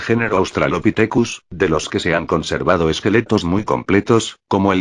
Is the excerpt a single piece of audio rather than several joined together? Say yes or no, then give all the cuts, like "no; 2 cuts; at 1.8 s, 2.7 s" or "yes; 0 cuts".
no; 1 cut; at 1.7 s